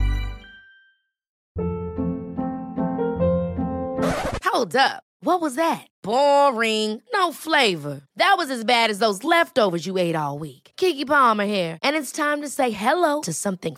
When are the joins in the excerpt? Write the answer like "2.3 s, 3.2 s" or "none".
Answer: 1.3 s